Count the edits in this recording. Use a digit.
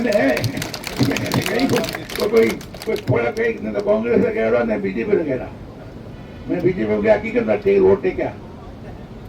0